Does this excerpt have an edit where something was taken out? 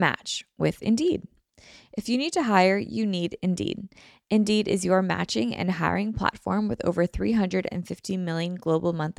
no; 0 cuts

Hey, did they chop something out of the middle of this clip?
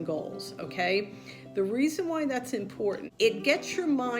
yes; 1 cut; at 3.1 s

